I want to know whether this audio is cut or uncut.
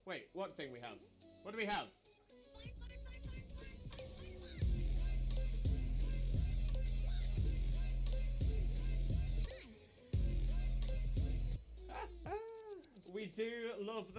uncut